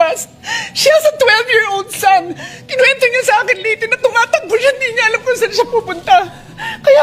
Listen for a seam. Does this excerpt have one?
no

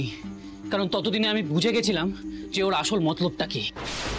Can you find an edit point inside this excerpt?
no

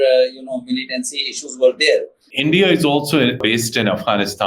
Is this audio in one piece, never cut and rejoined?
no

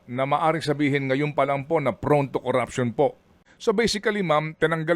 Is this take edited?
yes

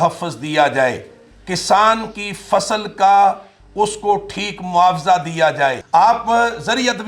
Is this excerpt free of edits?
no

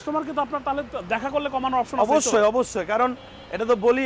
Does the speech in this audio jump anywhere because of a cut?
no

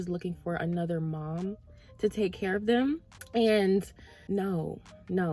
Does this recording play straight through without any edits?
yes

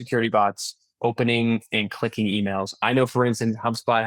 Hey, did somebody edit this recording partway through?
no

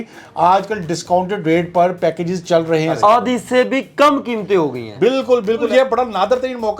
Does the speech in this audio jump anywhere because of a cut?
yes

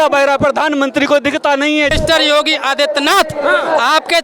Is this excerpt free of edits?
no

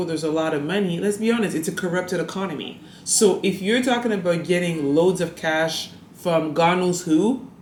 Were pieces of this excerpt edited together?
no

